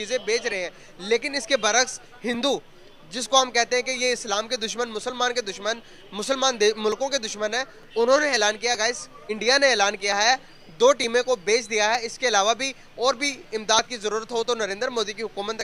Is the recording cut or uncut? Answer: uncut